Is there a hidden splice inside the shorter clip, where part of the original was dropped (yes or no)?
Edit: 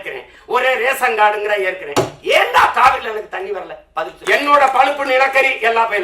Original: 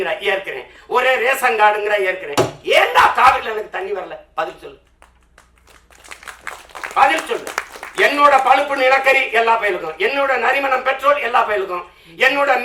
yes